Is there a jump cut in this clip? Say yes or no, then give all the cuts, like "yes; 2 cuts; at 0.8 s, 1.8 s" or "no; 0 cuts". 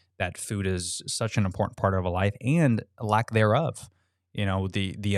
no; 0 cuts